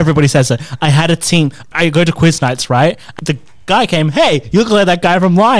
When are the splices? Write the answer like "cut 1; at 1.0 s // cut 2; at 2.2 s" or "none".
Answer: cut 1; at 1.6 s // cut 2; at 3.1 s

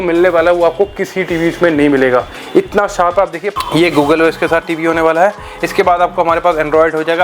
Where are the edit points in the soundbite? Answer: cut 1; at 3.5 s

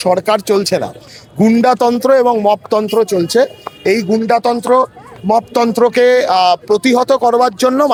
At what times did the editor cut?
none

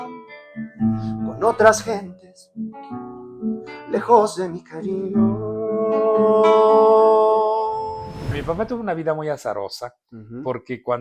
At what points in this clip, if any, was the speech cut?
cut 1; at 8.3 s

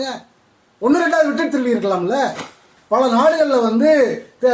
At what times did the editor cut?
cut 1; at 2.7 s

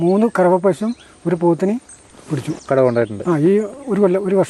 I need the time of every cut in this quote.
cut 1; at 2.6 s

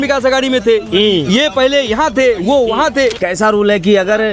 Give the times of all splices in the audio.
cut 1; at 3.2 s

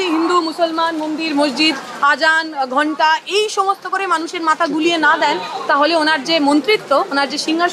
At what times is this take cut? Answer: none

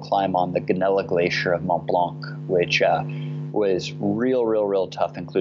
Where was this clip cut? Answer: none

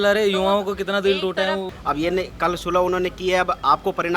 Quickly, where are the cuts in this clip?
cut 1; at 1.7 s

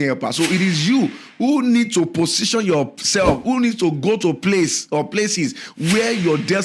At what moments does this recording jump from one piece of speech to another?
none

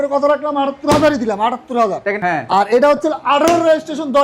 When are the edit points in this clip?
cut 1; at 2.1 s

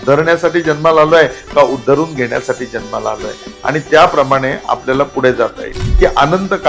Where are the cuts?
cut 1; at 5.8 s

